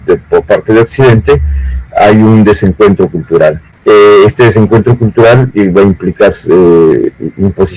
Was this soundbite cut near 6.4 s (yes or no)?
no